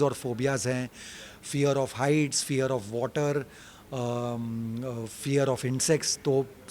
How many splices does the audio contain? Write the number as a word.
zero